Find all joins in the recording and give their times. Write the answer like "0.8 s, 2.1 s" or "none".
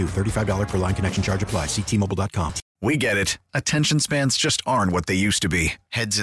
2.6 s